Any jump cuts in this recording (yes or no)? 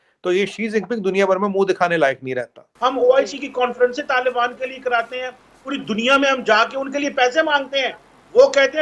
yes